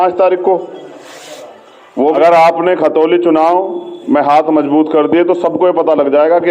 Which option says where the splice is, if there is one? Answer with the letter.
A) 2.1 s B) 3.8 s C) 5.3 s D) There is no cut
A